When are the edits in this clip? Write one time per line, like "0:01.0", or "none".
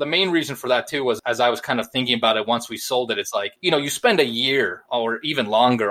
0:03.5
0:04.8